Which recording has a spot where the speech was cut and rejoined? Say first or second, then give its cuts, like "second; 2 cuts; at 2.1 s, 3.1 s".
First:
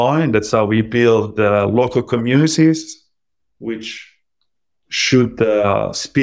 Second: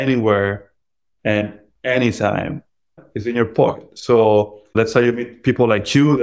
second; 2 cuts; at 3.0 s, 4.7 s